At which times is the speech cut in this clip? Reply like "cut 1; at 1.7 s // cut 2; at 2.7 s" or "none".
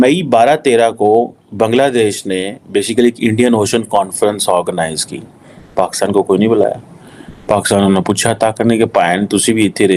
none